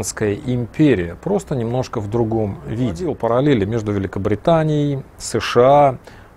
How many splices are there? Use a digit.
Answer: 1